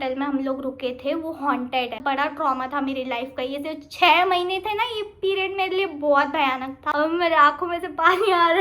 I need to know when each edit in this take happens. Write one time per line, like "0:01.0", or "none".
0:02.0
0:06.8